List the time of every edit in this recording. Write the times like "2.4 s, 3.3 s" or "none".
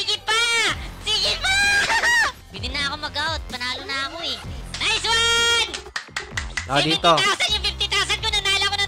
2.5 s, 4.6 s

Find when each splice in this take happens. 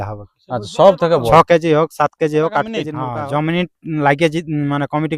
3.0 s

